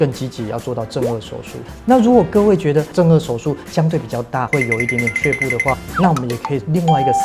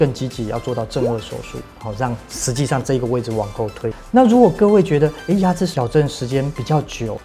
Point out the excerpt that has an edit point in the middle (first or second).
first